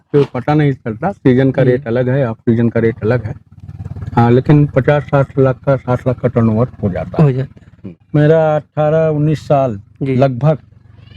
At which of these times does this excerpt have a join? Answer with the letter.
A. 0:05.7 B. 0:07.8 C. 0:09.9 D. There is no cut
B